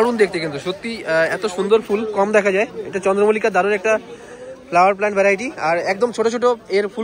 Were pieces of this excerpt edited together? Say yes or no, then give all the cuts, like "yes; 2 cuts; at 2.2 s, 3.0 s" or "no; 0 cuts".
no; 0 cuts